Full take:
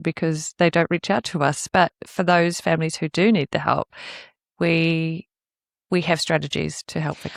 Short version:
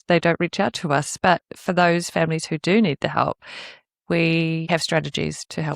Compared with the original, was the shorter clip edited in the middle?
yes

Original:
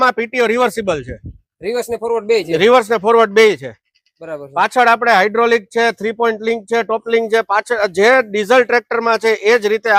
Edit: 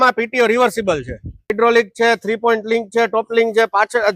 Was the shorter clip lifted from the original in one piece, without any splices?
no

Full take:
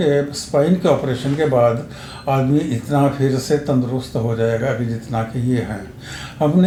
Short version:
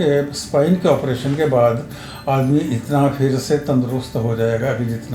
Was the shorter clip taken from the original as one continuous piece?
yes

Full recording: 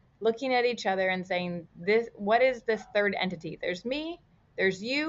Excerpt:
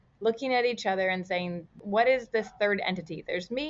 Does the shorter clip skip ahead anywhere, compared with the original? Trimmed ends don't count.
yes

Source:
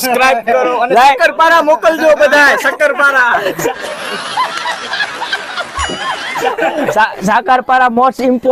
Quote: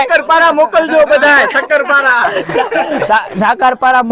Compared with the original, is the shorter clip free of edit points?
no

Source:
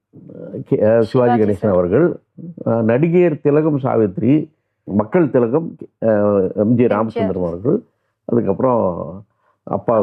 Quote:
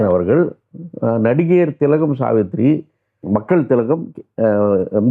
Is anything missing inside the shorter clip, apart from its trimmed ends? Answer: no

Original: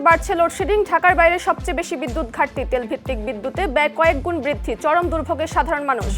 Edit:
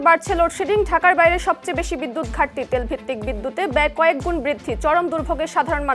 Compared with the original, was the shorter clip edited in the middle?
no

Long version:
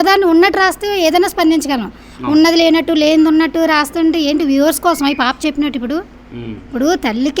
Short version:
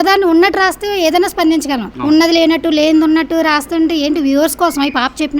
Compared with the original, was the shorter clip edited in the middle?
yes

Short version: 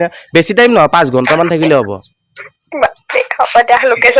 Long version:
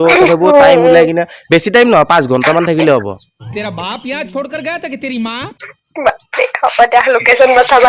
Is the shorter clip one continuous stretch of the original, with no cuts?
no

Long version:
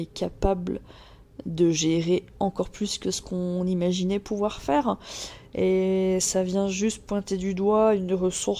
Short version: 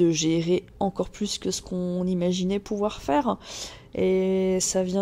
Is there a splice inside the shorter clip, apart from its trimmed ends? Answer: no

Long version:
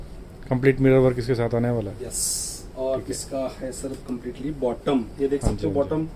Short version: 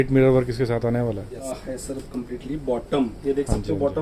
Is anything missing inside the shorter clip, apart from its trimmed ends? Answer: yes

